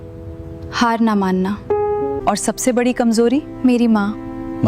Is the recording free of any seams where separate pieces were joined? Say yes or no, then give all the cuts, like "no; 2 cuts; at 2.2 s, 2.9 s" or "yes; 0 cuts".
no; 1 cut; at 2.2 s